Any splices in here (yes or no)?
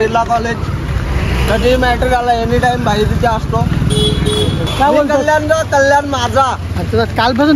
yes